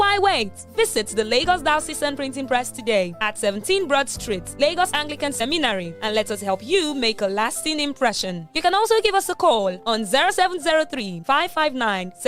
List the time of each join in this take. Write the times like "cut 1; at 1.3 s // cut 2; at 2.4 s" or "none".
none